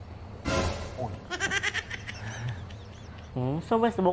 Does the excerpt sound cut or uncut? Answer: cut